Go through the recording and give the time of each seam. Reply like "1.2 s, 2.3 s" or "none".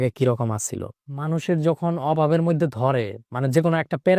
1.1 s

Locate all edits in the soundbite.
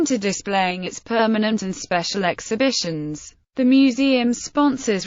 1.8 s

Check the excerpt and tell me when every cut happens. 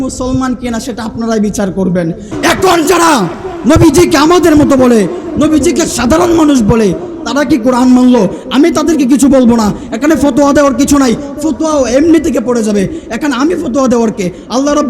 2.3 s

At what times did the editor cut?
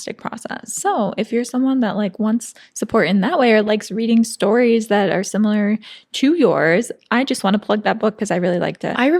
none

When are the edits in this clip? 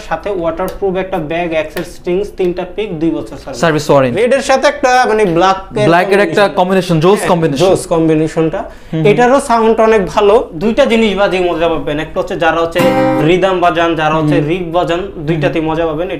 4.1 s, 10.5 s

